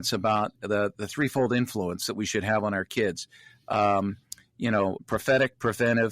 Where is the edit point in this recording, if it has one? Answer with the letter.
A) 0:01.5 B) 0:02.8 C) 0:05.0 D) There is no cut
C